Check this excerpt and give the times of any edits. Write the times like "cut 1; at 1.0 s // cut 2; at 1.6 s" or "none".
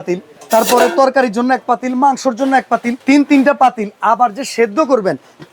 cut 1; at 2.9 s